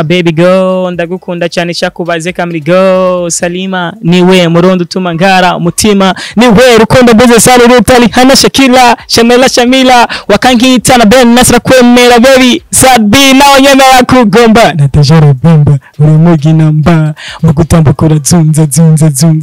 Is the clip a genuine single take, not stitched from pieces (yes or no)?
yes